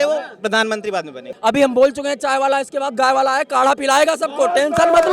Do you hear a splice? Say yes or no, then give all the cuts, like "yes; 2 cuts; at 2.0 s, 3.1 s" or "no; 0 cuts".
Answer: yes; 1 cut; at 1.3 s